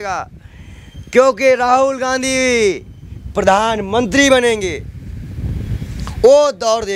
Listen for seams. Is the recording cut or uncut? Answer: uncut